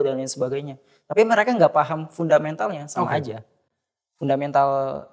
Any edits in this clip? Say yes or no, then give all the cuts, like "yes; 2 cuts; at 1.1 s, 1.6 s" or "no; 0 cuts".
no; 0 cuts